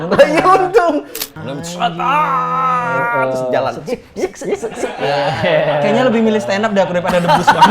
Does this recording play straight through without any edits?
no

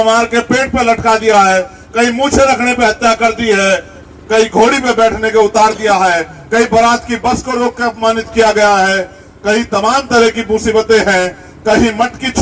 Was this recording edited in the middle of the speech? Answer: no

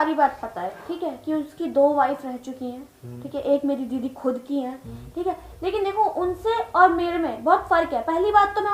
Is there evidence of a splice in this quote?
no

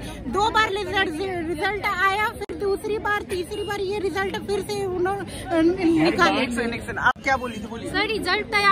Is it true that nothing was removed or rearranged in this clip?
yes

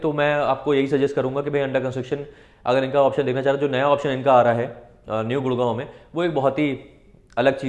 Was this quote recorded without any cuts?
yes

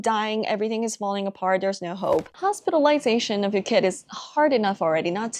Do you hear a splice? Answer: yes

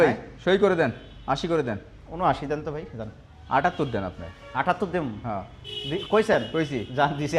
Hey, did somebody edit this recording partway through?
no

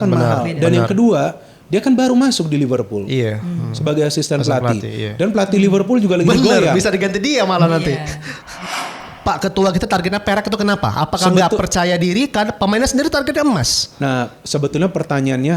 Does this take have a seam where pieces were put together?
yes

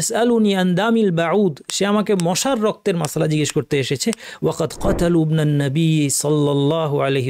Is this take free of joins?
yes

